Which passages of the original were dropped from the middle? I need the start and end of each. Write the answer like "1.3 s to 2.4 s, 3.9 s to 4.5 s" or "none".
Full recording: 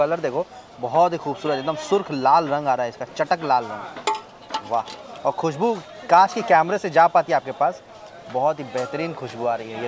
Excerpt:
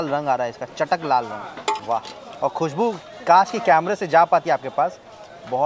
4.2 s to 4.6 s